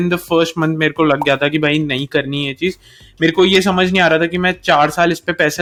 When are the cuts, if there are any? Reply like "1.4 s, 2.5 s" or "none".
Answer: none